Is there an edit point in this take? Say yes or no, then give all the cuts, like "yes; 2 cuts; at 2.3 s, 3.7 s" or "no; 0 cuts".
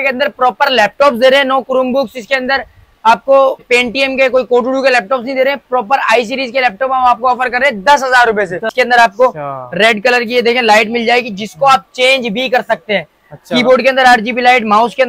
yes; 2 cuts; at 3.6 s, 8.7 s